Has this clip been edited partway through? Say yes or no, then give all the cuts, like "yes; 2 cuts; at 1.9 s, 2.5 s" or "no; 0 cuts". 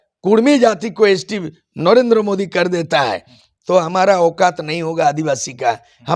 no; 0 cuts